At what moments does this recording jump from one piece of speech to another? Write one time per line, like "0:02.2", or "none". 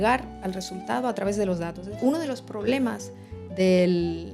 0:02.0